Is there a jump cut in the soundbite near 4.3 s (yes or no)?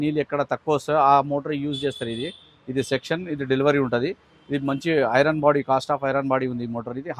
no